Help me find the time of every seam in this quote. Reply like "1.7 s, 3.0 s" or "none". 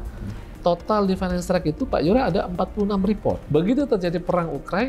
3.4 s